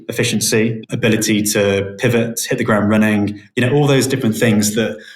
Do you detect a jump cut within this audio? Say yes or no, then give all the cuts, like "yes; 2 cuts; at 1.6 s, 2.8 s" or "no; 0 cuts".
yes; 1 cut; at 0.9 s